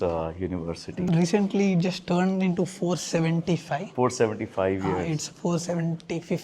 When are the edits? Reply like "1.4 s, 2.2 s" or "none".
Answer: 1.1 s